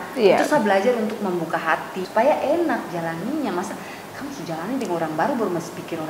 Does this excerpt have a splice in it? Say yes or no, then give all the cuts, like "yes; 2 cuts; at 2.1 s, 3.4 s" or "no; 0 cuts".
yes; 1 cut; at 2.0 s